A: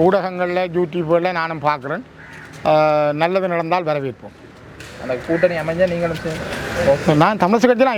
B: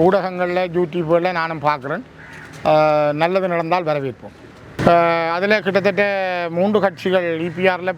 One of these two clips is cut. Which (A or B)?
B